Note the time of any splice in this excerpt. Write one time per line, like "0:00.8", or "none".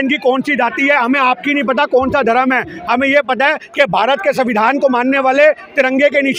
none